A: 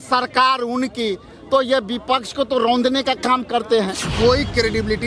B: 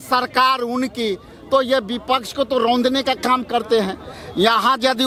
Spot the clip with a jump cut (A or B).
A